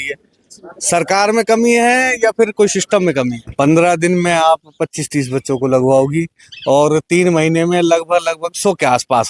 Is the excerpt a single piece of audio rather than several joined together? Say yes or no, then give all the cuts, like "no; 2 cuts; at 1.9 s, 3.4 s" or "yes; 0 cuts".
no; 1 cut; at 3.5 s